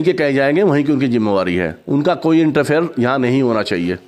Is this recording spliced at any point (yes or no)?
no